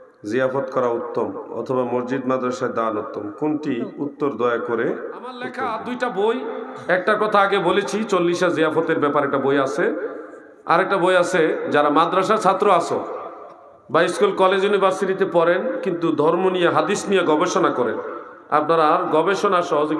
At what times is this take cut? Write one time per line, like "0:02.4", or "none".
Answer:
0:05.5